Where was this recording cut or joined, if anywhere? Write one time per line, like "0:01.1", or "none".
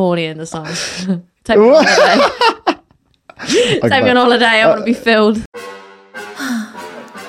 0:05.4